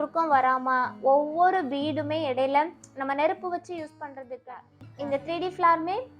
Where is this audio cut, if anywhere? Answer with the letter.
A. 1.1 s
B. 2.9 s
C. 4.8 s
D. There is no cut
C